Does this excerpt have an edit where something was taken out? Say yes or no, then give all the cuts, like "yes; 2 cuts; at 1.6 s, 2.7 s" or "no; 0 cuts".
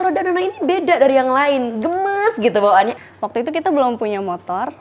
yes; 1 cut; at 3.0 s